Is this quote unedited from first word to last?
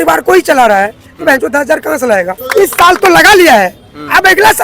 no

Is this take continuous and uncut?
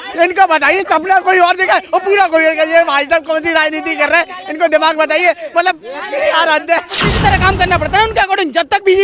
no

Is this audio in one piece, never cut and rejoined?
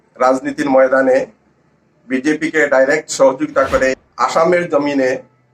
no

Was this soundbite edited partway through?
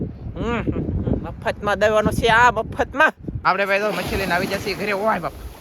yes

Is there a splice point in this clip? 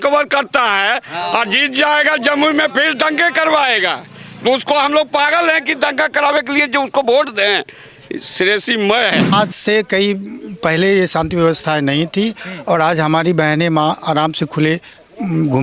yes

